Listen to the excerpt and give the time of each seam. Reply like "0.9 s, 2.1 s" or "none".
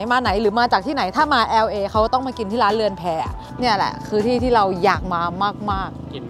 3.6 s